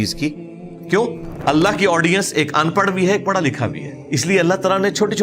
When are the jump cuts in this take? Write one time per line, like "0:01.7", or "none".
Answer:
0:01.3
0:03.9